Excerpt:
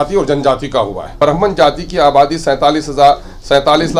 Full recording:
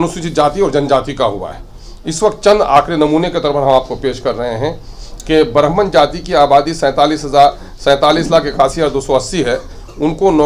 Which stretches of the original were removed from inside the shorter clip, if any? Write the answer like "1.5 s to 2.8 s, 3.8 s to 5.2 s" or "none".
1.6 s to 5.5 s